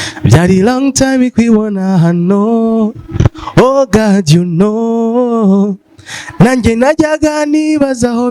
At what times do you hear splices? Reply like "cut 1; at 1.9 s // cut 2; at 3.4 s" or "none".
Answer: none